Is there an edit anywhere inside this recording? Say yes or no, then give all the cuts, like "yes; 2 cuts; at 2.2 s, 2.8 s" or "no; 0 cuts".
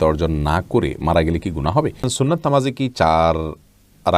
yes; 1 cut; at 2.0 s